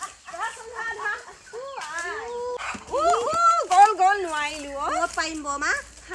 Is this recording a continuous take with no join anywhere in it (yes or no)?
yes